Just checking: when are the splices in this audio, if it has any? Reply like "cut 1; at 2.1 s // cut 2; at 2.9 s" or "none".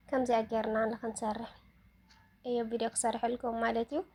none